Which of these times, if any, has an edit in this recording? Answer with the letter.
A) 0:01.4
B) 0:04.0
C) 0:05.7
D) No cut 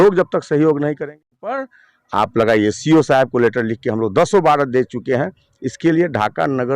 A